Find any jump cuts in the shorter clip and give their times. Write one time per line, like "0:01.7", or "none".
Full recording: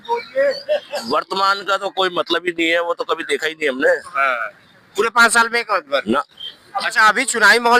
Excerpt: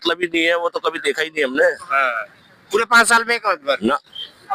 none